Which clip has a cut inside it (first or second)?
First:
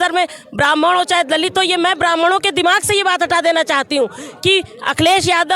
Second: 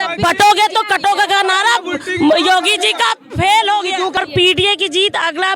second